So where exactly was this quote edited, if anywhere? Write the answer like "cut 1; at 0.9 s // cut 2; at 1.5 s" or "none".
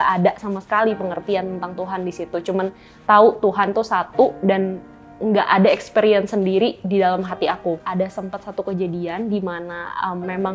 cut 1; at 7.8 s